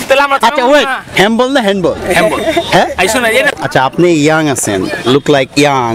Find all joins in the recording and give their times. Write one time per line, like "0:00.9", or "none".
0:03.6